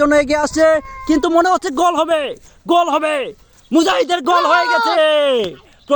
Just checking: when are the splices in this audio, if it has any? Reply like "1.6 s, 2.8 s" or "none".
none